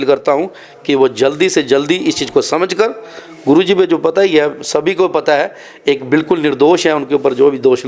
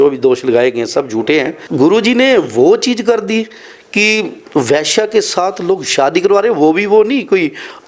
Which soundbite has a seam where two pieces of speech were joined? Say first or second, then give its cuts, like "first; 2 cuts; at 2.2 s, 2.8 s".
second; 1 cut; at 1.6 s